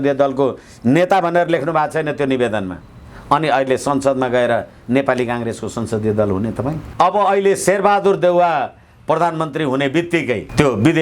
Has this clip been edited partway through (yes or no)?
yes